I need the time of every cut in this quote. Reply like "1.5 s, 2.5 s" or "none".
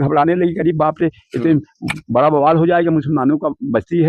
none